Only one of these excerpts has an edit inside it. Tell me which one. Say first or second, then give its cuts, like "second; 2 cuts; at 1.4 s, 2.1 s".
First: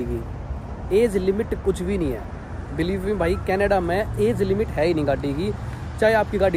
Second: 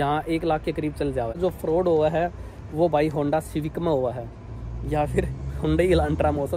second; 1 cut; at 1.4 s